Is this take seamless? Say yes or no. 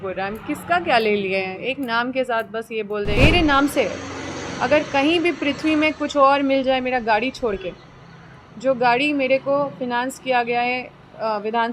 no